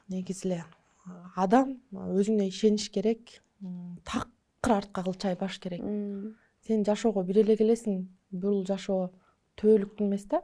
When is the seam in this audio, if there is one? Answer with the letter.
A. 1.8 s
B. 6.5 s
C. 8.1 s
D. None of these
D